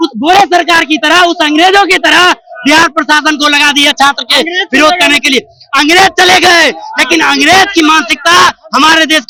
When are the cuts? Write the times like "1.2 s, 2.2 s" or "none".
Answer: none